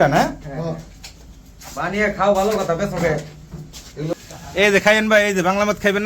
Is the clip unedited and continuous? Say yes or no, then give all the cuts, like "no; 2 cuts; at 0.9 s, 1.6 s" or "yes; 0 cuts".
no; 1 cut; at 4.1 s